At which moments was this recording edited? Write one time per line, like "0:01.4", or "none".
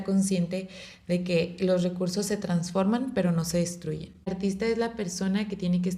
0:04.3